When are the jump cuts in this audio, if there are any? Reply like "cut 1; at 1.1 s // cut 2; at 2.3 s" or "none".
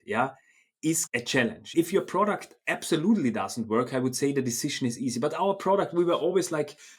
cut 1; at 1.3 s